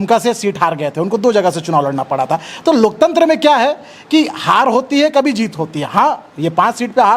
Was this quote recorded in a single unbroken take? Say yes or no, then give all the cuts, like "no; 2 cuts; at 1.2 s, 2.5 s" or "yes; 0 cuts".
yes; 0 cuts